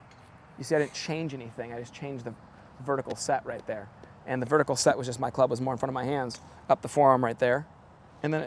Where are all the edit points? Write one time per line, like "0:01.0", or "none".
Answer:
none

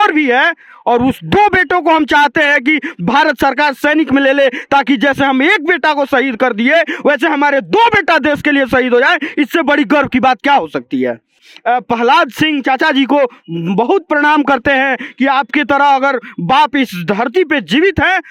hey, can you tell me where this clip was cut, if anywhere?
0:11.5

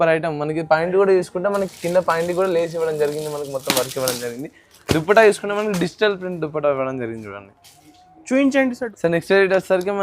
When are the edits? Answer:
0:08.9

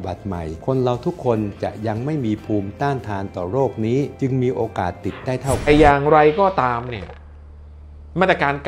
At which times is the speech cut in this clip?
0:05.7

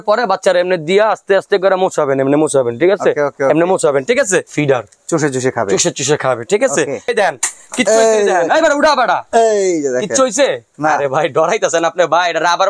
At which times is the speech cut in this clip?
0:04.5
0:07.1

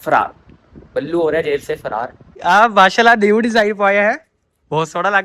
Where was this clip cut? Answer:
0:02.3

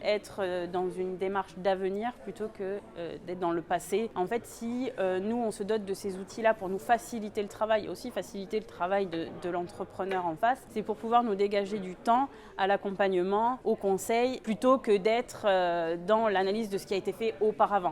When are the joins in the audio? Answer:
0:04.1
0:10.7
0:13.6
0:14.4

